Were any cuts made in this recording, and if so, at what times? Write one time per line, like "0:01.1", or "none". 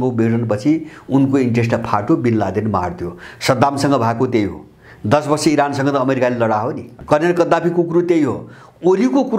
0:06.9